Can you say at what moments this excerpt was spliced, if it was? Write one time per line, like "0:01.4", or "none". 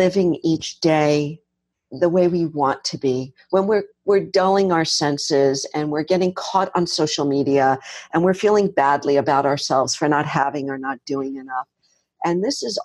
0:01.9